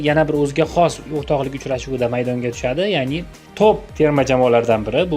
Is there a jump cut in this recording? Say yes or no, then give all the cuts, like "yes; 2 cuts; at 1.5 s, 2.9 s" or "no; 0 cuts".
no; 0 cuts